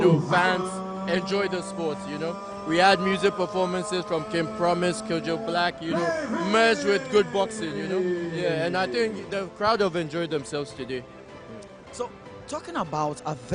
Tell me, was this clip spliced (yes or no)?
no